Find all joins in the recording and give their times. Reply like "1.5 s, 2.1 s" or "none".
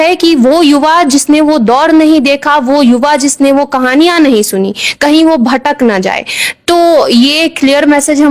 none